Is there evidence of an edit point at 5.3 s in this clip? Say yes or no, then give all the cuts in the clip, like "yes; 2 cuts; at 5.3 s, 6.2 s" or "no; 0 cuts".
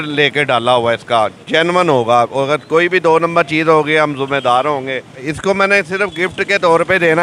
yes; 1 cut; at 5.3 s